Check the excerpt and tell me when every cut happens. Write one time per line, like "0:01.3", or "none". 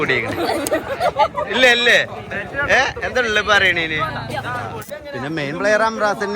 0:04.8